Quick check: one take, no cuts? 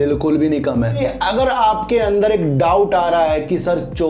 no; 1 cut; at 1.0 s

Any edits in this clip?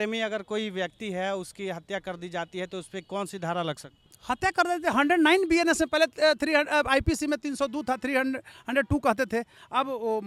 no; 0 cuts

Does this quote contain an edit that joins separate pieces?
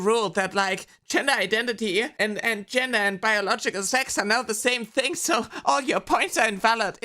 no; 0 cuts

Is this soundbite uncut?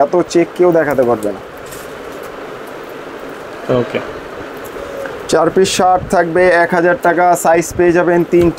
yes; 0 cuts

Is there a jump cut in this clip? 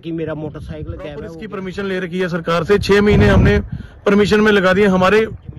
yes; 1 cut; at 1.4 s

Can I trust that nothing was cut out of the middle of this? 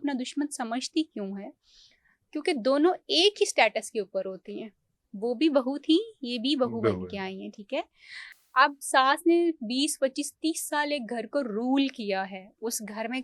yes; 0 cuts

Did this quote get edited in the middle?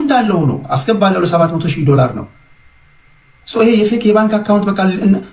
no; 0 cuts

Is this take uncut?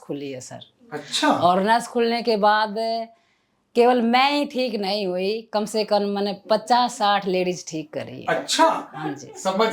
yes; 0 cuts

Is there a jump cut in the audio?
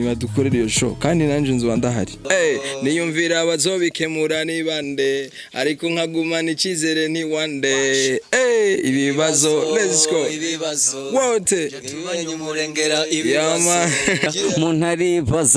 yes; 2 cuts; at 2.2 s, 14.3 s

